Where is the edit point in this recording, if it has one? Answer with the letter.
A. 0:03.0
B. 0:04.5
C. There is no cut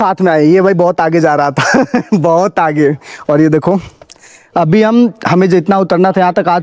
C